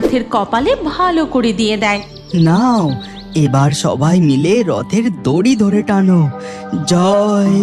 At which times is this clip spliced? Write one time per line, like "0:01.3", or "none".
0:02.1